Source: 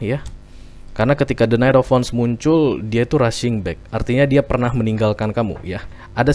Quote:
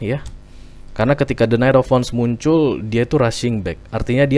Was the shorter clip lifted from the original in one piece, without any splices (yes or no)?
yes